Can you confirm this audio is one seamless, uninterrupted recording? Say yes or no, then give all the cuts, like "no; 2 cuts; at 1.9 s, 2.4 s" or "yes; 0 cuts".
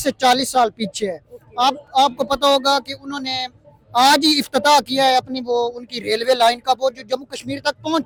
yes; 0 cuts